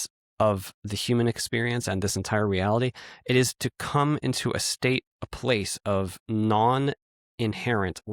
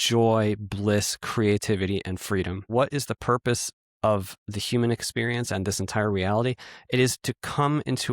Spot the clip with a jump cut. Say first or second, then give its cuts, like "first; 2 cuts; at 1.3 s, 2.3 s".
second; 1 cut; at 2.7 s